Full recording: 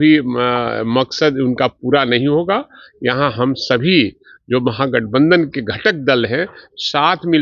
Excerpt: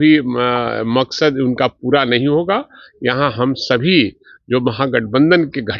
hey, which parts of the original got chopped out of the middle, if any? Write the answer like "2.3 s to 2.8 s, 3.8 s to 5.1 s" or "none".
none